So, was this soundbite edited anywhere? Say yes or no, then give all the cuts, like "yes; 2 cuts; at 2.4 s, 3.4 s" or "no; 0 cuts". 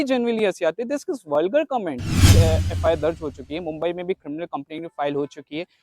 yes; 1 cut; at 2.3 s